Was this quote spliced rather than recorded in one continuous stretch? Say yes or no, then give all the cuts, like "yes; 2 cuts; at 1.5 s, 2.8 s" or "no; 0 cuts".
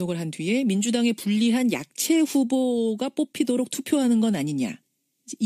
no; 0 cuts